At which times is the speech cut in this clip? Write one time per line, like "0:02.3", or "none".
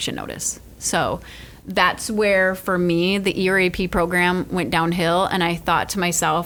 none

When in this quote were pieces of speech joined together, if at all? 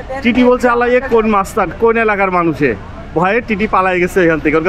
none

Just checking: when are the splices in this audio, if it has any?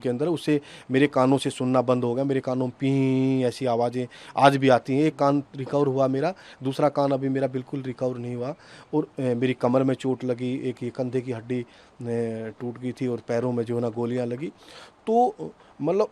none

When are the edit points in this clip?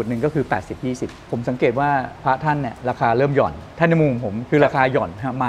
0:01.2
0:03.6

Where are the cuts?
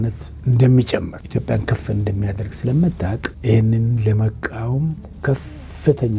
0:01.2
0:03.3

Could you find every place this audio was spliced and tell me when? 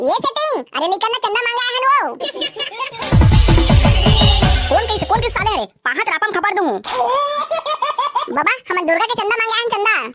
0:02.1
0:08.3

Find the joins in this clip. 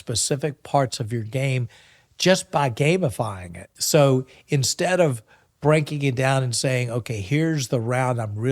0:03.7
0:07.2

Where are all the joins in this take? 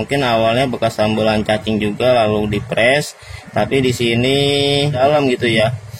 0:05.0

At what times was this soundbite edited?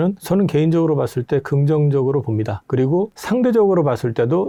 none

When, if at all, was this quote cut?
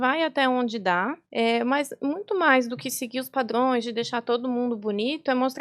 0:01.2

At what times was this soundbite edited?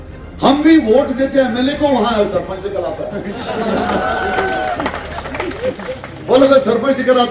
none

